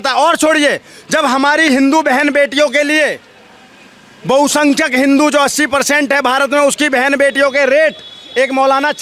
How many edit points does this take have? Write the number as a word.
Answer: zero